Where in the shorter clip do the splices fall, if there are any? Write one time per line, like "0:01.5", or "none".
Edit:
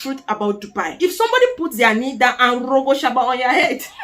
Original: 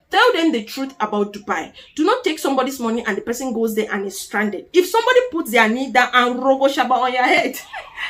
0:00.9

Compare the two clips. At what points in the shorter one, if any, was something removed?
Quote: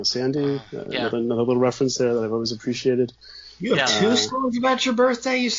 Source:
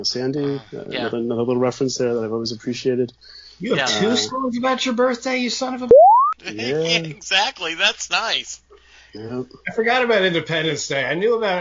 none

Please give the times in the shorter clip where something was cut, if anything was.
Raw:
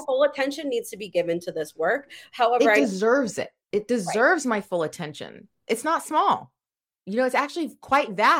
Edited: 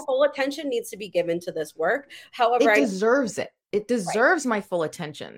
none

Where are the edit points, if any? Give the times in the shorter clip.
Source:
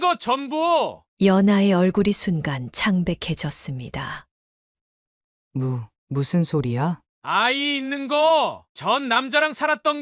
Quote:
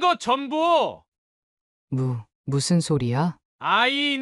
0:01.0

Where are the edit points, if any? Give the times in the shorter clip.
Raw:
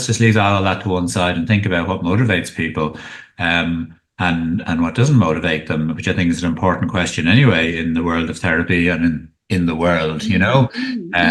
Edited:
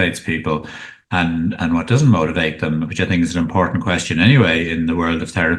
0:00.9

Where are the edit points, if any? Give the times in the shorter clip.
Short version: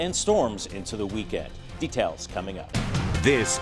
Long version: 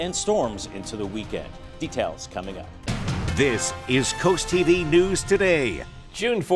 0:02.6

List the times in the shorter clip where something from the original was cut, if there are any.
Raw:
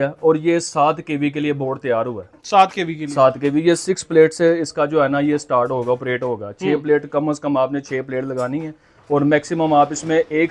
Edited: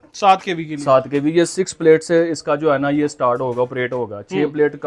none

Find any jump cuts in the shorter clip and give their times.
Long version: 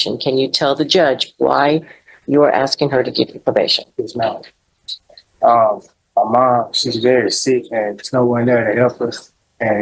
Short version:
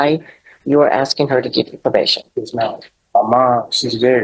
0:02.9

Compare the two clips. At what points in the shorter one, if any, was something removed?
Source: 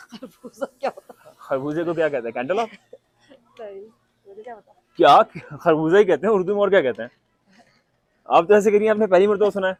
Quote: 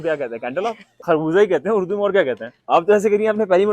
0:00.9
0:02.5

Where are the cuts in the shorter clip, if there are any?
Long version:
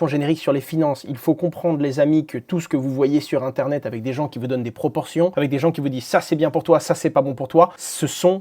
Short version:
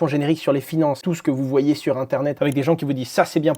0:01.0
0:02.4

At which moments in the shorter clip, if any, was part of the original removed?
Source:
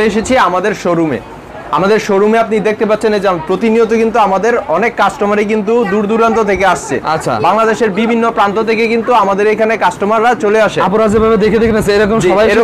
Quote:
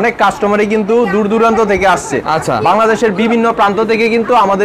none

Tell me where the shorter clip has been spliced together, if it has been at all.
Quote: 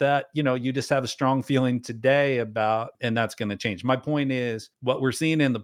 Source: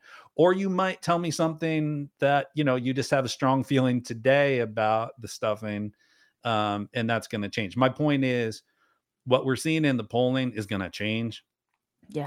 0:02.9
0:04.7

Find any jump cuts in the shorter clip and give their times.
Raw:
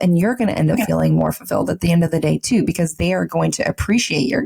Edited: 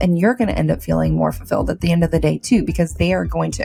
none

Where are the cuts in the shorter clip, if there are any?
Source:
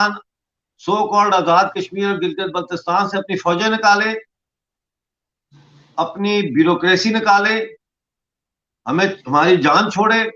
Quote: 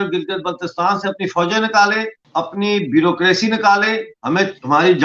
0:02.2
0:04.1

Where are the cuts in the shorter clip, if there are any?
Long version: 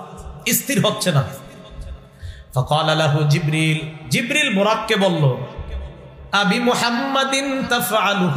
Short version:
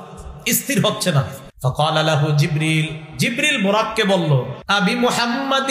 0:01.4
0:04.6

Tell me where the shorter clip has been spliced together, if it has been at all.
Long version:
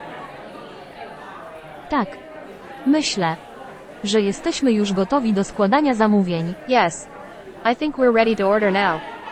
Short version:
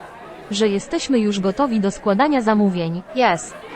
none

